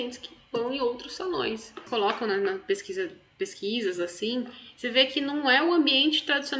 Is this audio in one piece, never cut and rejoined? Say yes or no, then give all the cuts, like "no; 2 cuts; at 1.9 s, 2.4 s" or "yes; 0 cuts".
no; 1 cut; at 1.8 s